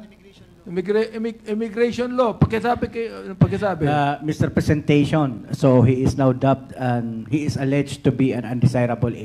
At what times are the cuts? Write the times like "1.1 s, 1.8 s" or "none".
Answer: none